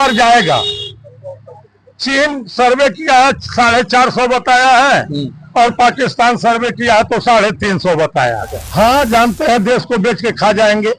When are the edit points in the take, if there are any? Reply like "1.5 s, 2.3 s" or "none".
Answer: 8.6 s

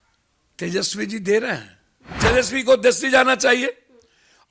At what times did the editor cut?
2.2 s

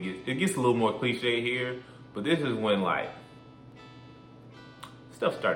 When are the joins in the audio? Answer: none

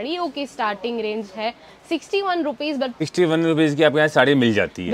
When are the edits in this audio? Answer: 3.0 s

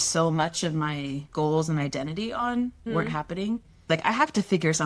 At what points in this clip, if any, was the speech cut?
1.2 s, 2.9 s, 3.9 s

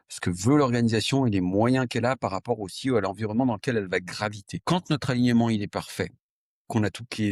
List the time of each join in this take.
4.5 s

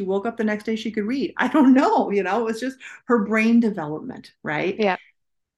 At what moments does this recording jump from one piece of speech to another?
none

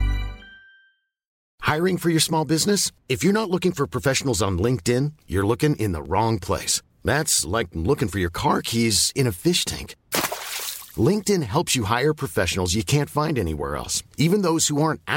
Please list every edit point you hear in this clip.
1.3 s

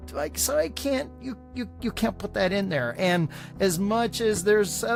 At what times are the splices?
none

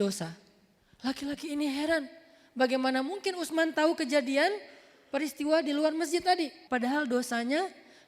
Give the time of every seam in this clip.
6.6 s

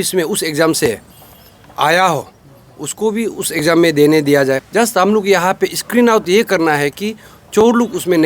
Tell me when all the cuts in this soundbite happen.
4.6 s

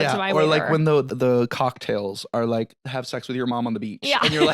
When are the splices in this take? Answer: 1.1 s, 2.8 s

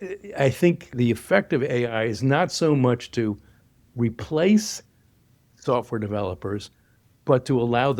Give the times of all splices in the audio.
0.9 s

